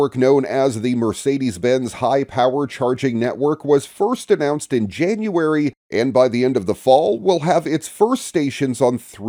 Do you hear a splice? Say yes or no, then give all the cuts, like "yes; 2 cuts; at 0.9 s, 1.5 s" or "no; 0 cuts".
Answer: no; 0 cuts